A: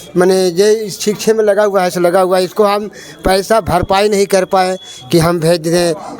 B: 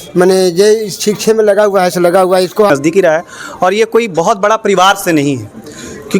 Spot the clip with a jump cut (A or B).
B